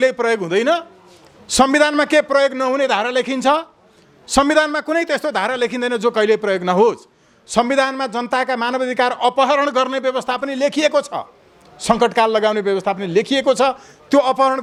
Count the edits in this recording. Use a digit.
0